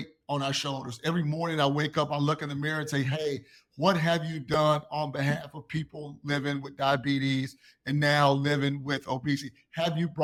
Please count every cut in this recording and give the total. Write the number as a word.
zero